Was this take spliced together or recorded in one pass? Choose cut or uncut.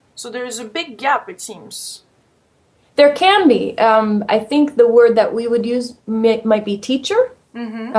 uncut